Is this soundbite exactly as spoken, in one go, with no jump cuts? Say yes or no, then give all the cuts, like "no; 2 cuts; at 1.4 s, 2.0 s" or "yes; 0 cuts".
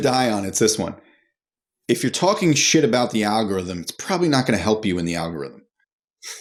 yes; 0 cuts